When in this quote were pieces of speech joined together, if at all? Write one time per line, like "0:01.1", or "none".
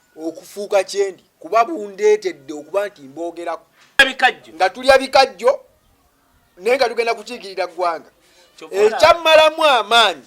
0:04.0